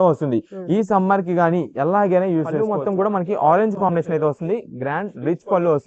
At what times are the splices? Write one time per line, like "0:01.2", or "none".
0:02.6